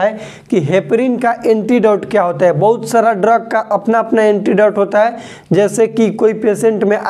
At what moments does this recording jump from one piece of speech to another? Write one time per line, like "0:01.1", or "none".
none